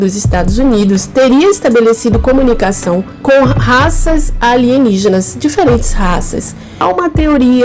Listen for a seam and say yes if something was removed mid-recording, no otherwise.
yes